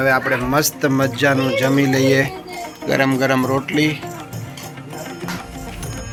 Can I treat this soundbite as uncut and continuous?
yes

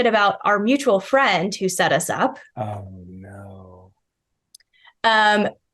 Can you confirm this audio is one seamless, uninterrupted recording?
yes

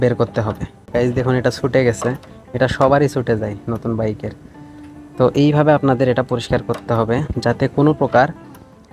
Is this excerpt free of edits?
yes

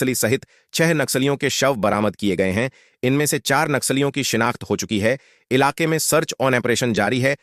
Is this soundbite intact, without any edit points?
yes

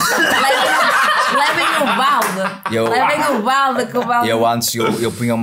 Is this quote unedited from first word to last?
yes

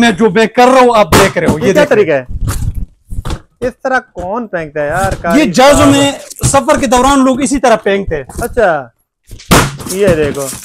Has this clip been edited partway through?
no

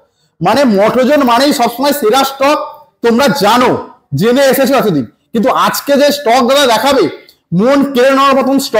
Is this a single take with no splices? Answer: yes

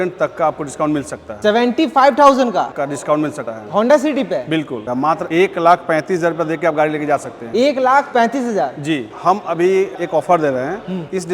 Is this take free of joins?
no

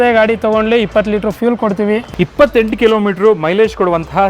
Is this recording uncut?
no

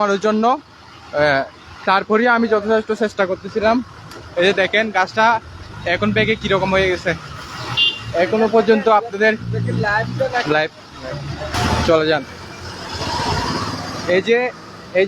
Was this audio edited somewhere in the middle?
yes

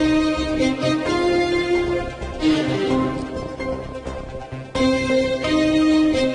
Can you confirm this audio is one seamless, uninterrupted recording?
yes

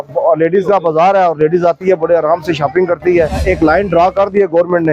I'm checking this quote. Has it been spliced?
yes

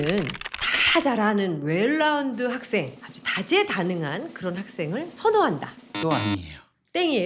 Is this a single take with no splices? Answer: yes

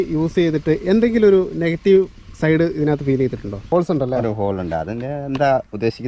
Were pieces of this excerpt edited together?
yes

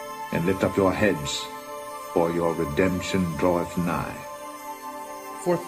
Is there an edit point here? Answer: no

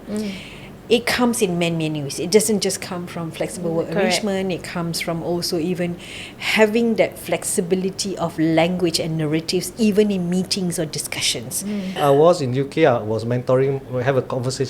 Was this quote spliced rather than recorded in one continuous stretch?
yes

